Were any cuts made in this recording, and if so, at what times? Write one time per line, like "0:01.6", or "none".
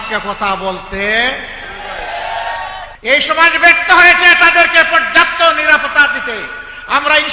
0:02.9